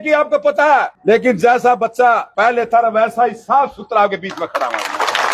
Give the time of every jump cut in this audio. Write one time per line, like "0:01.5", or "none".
0:00.9
0:02.3